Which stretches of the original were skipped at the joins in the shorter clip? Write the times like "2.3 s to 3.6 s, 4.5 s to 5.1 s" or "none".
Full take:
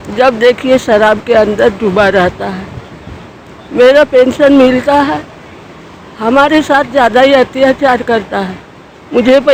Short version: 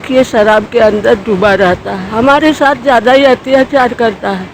2.5 s to 6.1 s